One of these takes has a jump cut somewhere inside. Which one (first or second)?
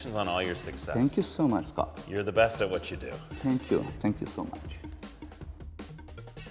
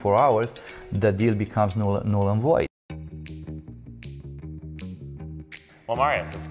second